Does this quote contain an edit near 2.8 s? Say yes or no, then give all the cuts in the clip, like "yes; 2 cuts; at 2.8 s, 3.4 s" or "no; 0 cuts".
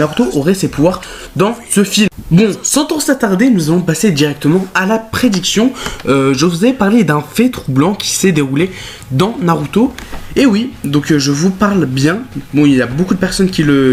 no; 0 cuts